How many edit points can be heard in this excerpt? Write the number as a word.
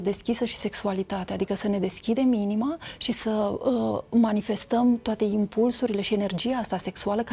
zero